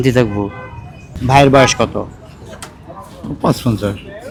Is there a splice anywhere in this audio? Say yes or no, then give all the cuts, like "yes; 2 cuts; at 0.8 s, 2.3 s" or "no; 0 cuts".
no; 0 cuts